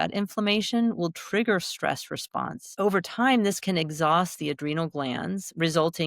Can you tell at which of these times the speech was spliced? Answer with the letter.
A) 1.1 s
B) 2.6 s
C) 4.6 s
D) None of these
B